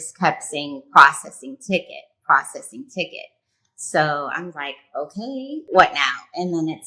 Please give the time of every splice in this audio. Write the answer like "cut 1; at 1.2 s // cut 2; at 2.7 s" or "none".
cut 1; at 5.6 s